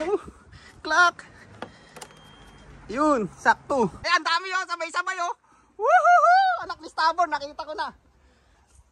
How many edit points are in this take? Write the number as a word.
one